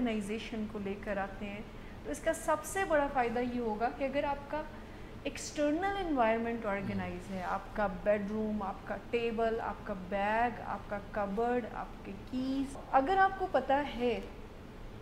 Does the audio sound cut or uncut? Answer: cut